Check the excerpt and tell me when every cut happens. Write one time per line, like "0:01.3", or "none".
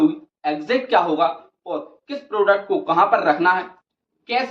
none